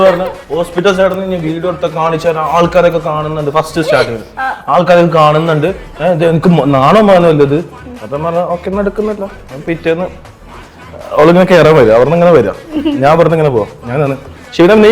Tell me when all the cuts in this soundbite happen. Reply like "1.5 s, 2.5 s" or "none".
none